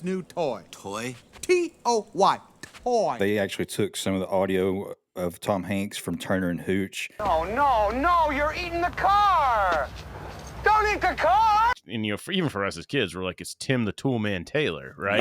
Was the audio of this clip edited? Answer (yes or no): yes